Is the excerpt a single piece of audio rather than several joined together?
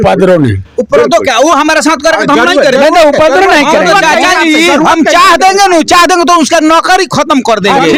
yes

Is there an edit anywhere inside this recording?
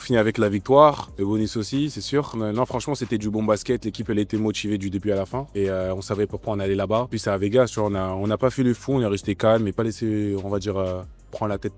yes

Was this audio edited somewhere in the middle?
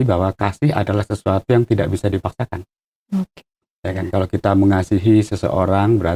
no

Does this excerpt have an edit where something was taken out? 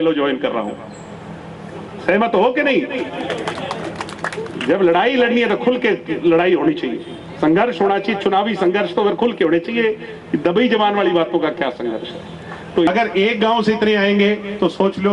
yes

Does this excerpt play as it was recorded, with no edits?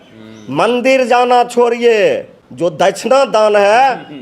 no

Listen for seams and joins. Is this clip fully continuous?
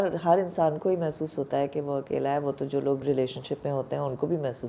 no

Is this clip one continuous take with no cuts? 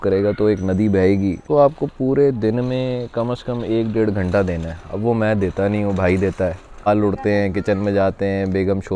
no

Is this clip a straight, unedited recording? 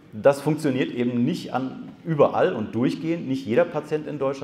yes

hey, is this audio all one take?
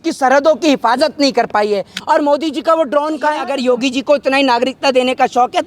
no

